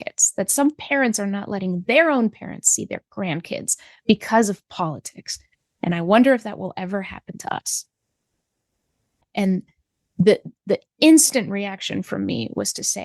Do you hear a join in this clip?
yes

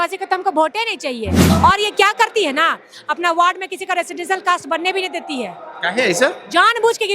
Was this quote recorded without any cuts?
no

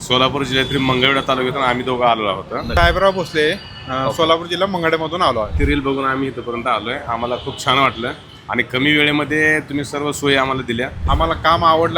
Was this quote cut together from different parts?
yes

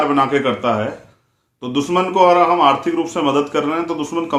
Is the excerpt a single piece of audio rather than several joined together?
yes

